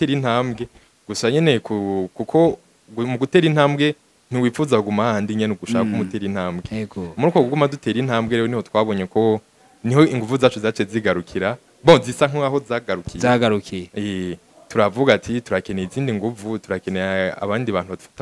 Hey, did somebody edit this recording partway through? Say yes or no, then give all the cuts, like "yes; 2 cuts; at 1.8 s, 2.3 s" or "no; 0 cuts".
no; 0 cuts